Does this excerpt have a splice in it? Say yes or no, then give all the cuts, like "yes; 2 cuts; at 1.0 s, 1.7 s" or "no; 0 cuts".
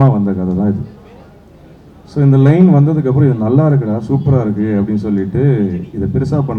no; 0 cuts